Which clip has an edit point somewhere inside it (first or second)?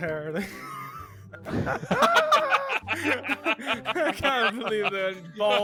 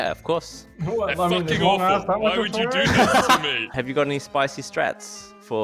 second